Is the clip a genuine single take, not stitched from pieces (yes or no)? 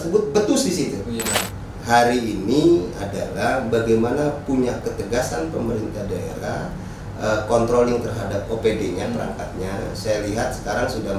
no